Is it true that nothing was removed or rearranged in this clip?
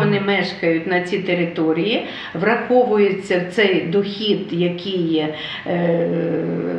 yes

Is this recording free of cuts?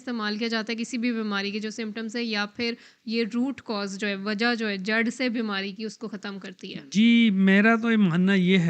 yes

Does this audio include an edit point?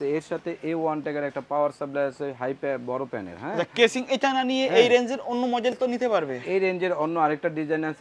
no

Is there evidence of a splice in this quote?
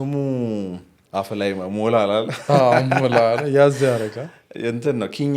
yes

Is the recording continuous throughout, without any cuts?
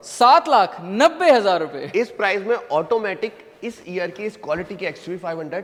yes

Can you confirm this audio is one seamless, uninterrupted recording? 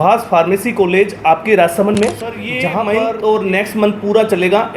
no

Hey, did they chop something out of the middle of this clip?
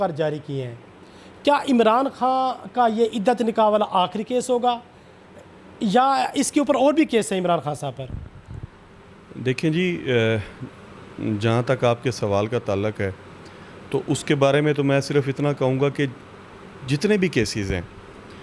no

